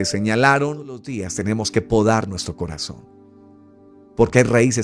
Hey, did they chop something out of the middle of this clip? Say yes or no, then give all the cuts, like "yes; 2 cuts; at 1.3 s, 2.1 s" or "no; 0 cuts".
yes; 1 cut; at 1.3 s